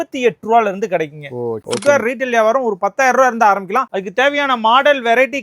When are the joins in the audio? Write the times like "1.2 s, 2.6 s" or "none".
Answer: 1.6 s